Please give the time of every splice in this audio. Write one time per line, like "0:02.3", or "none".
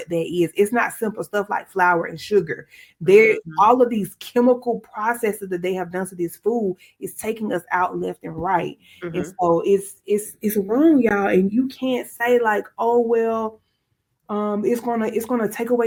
none

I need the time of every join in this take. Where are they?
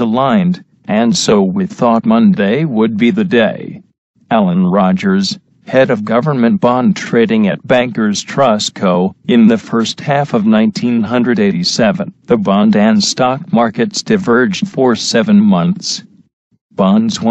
0:01.5

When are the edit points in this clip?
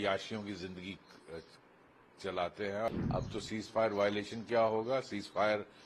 0:02.9

